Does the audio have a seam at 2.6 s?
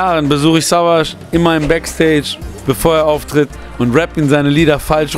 no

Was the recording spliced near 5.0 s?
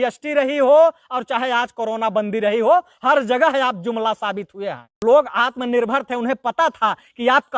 yes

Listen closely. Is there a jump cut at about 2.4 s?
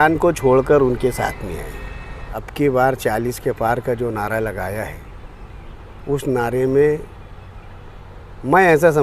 yes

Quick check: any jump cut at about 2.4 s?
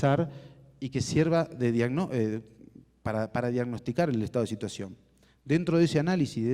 no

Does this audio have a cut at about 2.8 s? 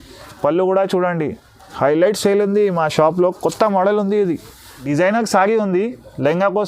no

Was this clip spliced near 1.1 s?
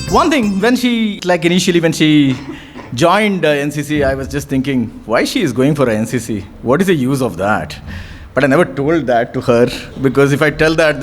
yes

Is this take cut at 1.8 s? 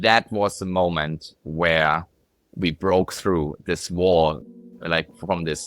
no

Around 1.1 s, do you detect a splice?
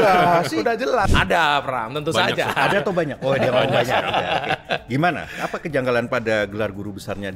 yes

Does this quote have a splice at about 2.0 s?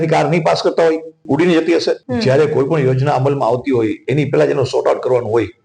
yes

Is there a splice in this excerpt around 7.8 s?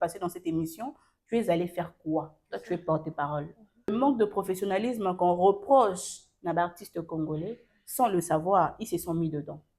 no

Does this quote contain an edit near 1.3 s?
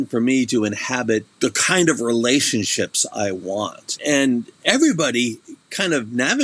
yes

